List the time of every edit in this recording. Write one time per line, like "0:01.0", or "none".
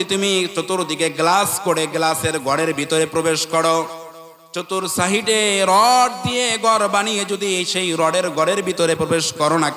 none